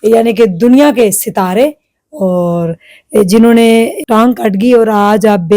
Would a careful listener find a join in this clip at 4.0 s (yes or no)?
yes